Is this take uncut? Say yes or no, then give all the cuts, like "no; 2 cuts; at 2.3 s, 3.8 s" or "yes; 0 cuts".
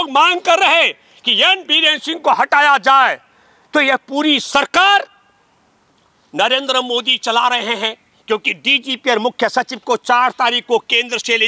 yes; 0 cuts